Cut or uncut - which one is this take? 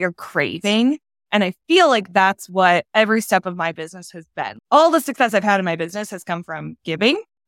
cut